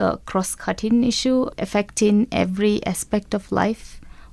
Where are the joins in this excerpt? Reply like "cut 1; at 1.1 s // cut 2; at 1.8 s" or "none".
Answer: cut 1; at 1.6 s